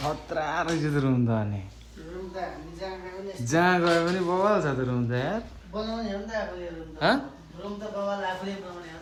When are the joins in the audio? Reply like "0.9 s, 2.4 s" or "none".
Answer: none